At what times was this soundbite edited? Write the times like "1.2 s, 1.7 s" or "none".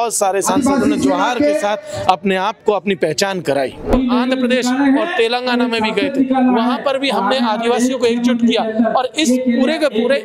3.9 s